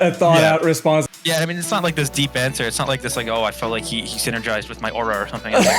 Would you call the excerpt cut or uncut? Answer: cut